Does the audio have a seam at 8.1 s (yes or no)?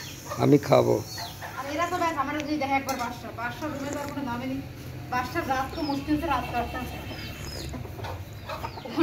no